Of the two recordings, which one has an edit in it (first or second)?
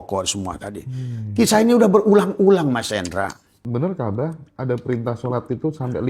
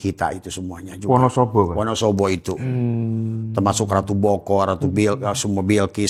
first